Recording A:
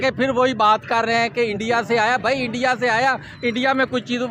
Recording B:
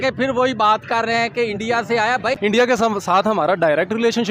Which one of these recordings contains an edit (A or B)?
B